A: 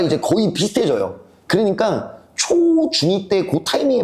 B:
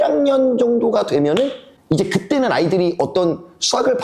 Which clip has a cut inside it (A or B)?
B